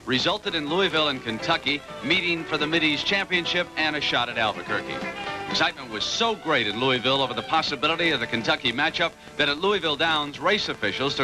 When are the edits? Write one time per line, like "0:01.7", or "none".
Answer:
none